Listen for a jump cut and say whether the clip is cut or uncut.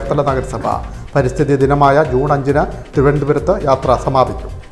uncut